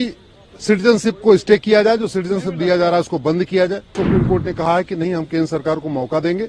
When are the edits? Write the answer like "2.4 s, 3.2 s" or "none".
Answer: 4.0 s